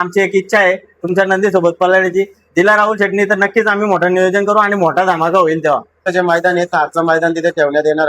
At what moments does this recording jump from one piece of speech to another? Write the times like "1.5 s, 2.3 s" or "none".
6.0 s